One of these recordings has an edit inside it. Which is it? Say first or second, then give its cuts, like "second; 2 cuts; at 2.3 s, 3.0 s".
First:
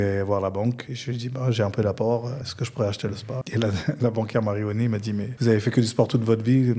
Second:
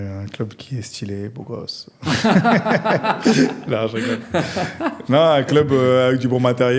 first; 4 cuts; at 0.9 s, 2.4 s, 3.4 s, 5.3 s